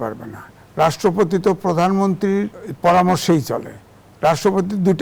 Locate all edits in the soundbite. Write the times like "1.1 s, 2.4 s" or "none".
2.6 s